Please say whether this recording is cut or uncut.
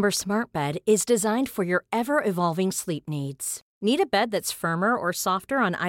uncut